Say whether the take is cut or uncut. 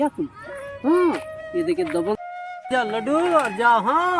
cut